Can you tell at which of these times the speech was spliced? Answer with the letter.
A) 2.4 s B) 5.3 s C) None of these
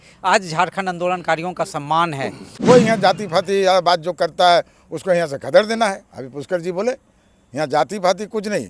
A